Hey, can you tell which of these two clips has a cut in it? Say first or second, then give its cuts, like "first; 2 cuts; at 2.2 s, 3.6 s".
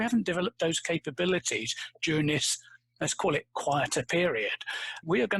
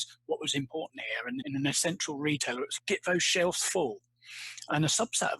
second; 2 cuts; at 1.4 s, 2.7 s